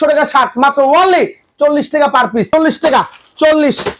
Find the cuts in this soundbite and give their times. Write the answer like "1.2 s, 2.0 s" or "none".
2.5 s